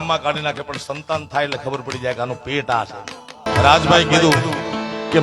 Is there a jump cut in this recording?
yes; 1 cut; at 3.4 s

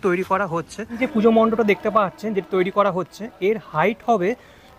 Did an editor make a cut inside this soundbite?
yes; 1 cut; at 1.0 s

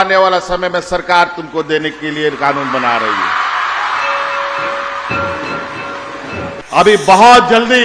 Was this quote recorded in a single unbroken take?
no; 1 cut; at 6.6 s

